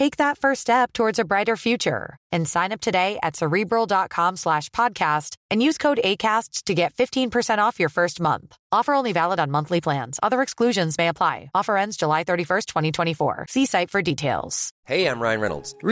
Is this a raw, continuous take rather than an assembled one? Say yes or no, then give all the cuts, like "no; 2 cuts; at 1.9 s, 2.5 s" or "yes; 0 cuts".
yes; 0 cuts